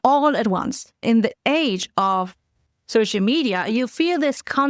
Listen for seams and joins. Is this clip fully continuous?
no; 1 cut; at 1.0 s

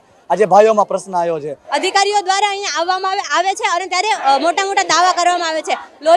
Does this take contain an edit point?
yes; 1 cut; at 1.6 s

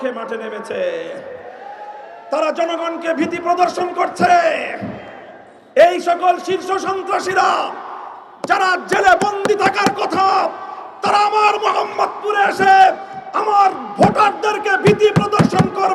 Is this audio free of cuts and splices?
yes; 0 cuts

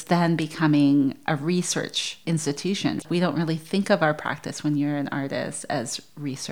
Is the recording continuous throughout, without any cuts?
no; 2 cuts; at 2.0 s, 3.0 s

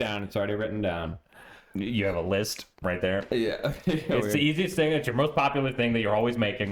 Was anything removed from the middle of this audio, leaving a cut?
no; 0 cuts

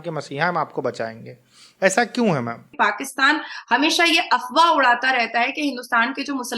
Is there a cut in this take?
yes; 1 cut; at 2.7 s

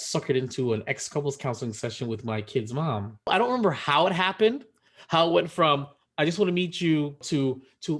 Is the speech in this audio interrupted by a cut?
yes; 2 cuts; at 3.3 s, 7.2 s

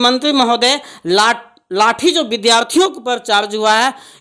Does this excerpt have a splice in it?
no; 0 cuts

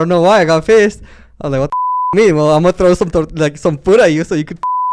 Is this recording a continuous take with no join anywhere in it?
yes; 0 cuts

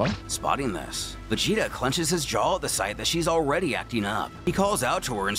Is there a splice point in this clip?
yes; 1 cut; at 4.4 s

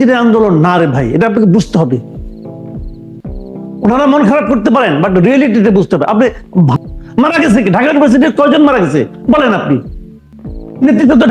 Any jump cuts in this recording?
yes; 3 cuts; at 2.2 s, 3.8 s, 6.7 s

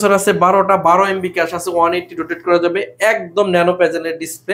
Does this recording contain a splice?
no; 0 cuts

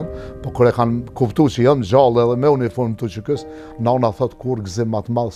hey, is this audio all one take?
yes; 0 cuts

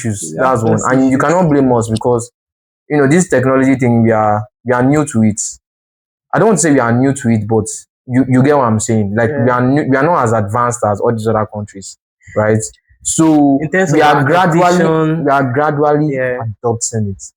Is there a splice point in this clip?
no; 0 cuts

